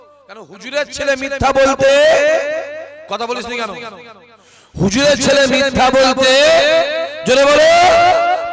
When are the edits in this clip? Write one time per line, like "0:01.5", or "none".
none